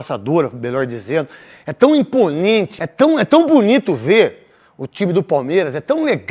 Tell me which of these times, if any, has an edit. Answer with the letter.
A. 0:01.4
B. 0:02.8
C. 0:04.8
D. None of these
B